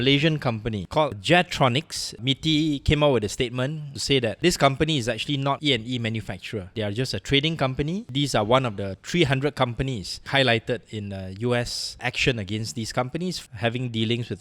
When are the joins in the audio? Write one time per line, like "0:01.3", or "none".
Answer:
0:00.9
0:02.2
0:03.9
0:10.2
0:11.8
0:13.4